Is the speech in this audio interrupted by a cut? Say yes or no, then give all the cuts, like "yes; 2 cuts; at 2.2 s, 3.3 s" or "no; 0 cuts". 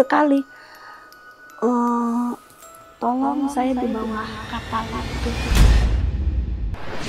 yes; 1 cut; at 5.5 s